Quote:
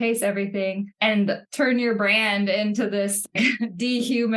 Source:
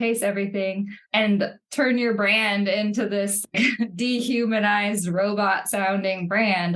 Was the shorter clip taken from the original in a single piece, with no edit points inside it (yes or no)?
no